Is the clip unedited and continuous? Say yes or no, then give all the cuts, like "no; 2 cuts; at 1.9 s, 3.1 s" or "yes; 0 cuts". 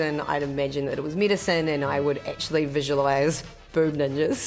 yes; 0 cuts